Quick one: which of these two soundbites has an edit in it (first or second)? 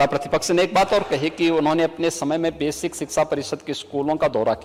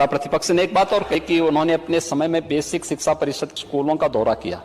second